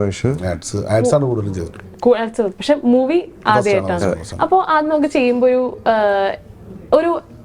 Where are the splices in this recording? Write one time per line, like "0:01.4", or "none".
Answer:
none